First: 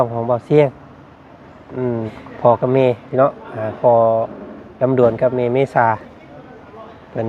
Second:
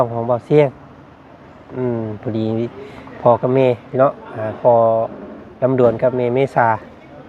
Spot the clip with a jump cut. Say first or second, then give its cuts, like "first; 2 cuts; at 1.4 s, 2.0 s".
first; 1 cut; at 2.1 s